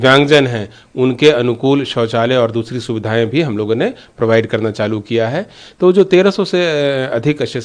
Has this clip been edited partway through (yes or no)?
no